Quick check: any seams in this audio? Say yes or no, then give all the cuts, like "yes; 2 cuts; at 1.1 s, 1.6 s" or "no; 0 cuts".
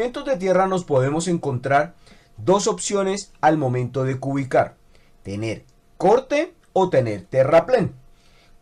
no; 0 cuts